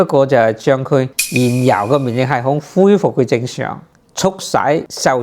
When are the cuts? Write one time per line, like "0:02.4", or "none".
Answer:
0:01.2
0:04.0